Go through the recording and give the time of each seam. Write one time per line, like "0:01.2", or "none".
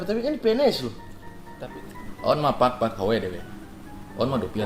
0:01.7